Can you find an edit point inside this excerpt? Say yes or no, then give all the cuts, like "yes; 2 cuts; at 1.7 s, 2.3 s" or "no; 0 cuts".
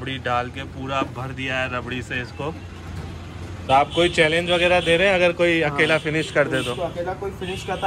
yes; 1 cut; at 3.6 s